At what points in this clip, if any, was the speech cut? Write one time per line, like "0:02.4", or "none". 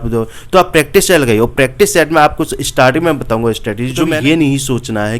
0:04.0

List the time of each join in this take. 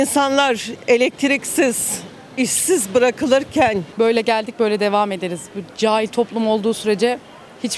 0:03.8

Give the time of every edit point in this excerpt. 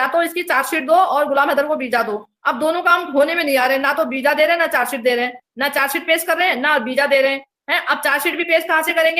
none

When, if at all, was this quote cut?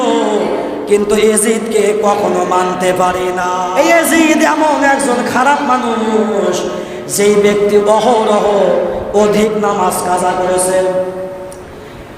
0:03.5

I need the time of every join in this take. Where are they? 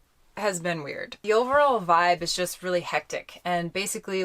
0:01.1

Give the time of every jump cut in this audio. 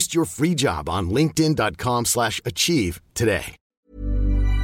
0:03.7

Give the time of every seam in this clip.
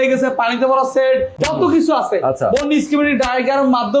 0:01.3

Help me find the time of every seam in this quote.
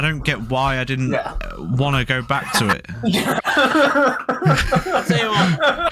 none

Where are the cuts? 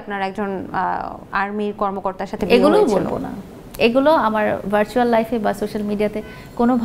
none

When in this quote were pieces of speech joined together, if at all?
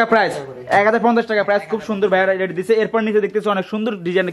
none

